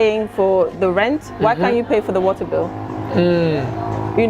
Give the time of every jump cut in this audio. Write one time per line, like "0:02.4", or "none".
none